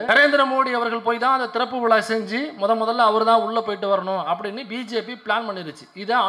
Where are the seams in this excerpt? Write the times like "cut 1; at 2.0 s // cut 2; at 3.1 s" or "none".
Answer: none